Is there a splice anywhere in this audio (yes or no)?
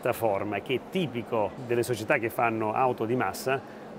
yes